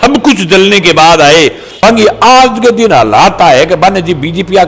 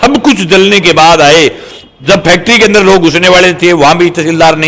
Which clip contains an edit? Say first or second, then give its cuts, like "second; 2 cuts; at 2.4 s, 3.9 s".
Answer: first; 1 cut; at 1.8 s